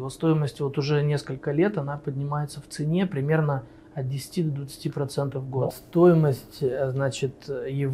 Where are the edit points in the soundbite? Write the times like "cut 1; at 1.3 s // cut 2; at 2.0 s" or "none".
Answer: cut 1; at 5.7 s